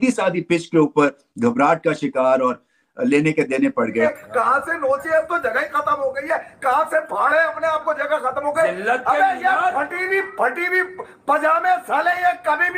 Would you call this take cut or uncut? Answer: cut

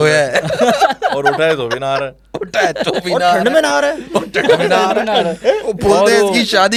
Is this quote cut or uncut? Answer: uncut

